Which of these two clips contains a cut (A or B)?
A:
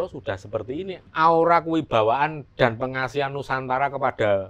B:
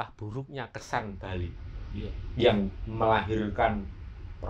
A